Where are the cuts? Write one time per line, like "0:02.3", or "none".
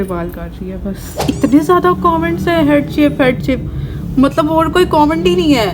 0:01.2